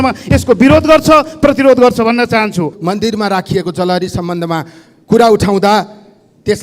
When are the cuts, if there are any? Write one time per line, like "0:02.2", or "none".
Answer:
0:02.7